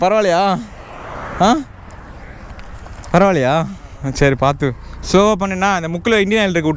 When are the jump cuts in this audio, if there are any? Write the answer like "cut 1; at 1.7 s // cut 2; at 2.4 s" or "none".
none